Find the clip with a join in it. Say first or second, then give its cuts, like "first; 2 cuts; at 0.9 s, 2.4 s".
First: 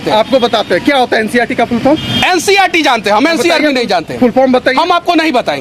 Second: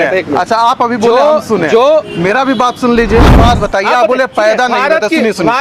second; 1 cut; at 3.3 s